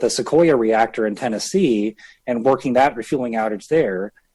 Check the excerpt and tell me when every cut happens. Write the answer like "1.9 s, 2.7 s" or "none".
none